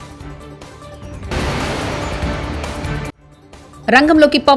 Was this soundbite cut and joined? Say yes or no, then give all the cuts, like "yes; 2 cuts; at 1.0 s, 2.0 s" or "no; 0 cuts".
yes; 2 cuts; at 1.3 s, 2.9 s